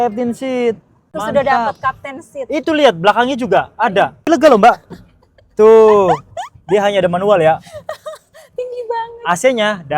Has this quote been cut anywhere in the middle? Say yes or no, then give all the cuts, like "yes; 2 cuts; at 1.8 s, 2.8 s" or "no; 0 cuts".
yes; 2 cuts; at 1.1 s, 4.2 s